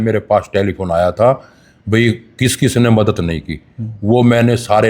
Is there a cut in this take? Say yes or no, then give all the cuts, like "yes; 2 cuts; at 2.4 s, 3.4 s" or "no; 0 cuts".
no; 0 cuts